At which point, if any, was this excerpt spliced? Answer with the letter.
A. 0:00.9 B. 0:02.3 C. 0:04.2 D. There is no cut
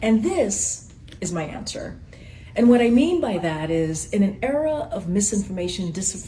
D